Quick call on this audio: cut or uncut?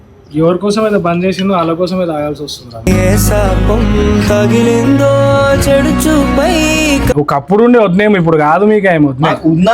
cut